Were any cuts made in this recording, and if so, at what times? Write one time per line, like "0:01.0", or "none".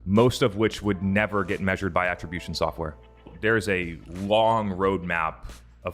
0:03.1